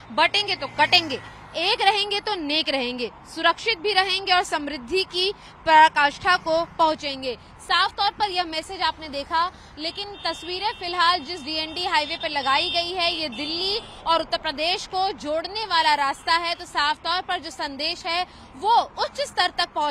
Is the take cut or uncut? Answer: uncut